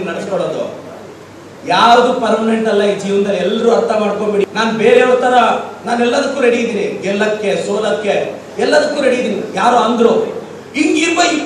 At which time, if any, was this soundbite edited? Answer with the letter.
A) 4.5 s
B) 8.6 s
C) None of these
A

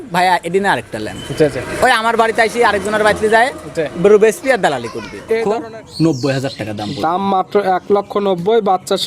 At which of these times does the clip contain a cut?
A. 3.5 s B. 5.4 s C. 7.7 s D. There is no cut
B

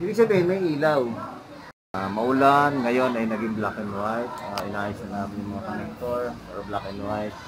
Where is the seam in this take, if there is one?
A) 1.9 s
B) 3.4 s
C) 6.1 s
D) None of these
A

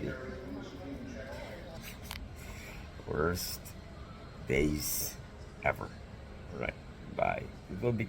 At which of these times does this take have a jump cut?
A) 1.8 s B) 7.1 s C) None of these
A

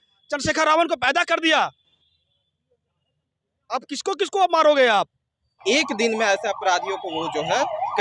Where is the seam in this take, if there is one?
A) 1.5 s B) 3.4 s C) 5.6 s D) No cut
C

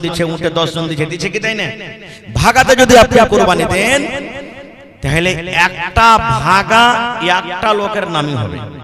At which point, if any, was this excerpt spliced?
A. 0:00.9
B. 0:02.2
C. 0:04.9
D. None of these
D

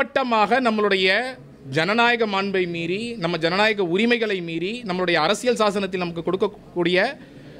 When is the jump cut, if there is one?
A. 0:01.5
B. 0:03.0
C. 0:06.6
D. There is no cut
D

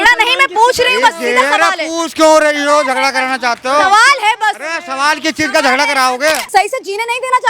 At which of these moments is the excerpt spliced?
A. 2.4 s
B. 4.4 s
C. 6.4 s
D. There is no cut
C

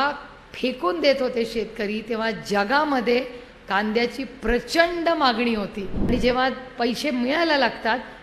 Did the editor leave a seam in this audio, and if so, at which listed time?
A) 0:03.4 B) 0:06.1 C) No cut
B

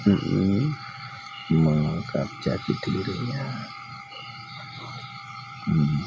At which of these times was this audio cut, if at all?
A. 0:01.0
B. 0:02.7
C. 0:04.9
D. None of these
D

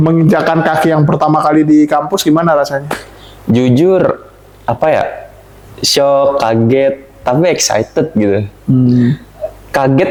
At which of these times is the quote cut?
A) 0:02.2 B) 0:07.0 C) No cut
C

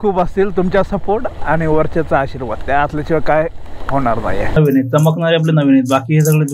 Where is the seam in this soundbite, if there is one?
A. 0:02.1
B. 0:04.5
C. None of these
B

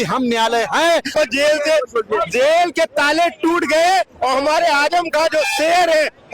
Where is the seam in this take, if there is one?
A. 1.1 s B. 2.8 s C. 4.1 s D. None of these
A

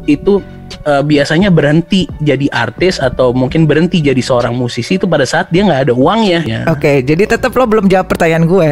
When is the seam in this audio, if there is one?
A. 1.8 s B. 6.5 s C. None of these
B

